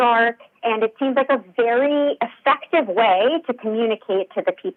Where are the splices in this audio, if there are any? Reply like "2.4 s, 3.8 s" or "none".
none